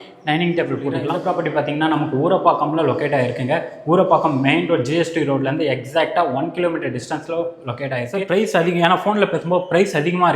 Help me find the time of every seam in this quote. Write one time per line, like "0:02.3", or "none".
0:01.0
0:08.1